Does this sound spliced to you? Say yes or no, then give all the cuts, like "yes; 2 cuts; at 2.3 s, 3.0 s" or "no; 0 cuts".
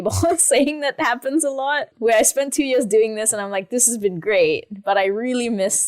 yes; 1 cut; at 1.9 s